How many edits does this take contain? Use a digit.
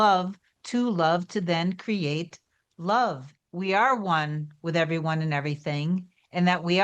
1